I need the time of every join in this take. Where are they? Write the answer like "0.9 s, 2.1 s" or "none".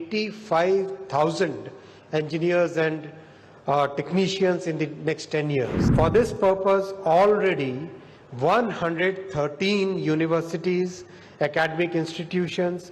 5.8 s